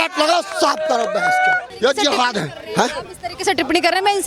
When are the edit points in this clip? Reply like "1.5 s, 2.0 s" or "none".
1.7 s